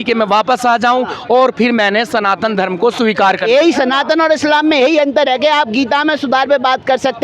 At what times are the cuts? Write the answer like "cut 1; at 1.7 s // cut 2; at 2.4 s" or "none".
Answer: none